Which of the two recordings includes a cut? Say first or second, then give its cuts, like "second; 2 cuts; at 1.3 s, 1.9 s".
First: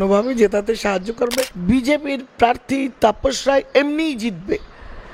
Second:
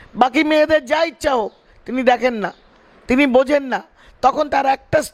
first; 1 cut; at 1.5 s